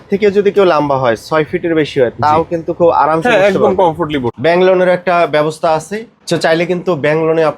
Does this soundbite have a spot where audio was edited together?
yes; 1 cut; at 4.3 s

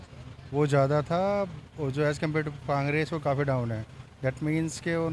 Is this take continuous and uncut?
yes; 0 cuts

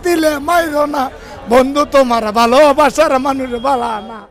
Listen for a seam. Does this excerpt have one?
no; 0 cuts

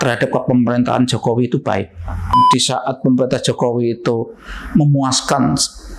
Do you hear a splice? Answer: yes; 1 cut; at 2.4 s

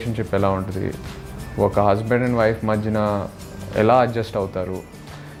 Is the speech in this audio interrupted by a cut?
no; 0 cuts

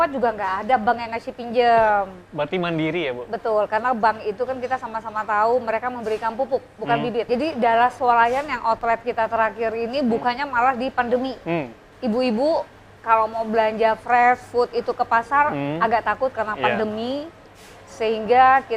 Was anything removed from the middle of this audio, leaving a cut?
yes; 2 cuts; at 7.3 s, 11.8 s

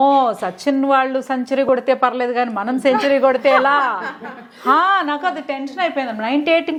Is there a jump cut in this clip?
no; 0 cuts

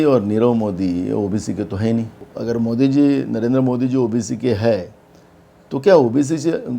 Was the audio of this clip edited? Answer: yes; 1 cut; at 2.2 s

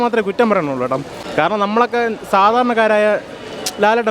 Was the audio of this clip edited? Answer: yes; 1 cut; at 1.2 s

